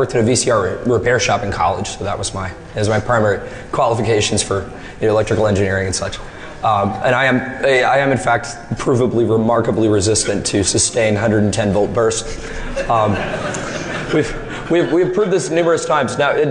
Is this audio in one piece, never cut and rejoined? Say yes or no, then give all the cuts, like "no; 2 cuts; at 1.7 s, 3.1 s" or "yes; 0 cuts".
yes; 0 cuts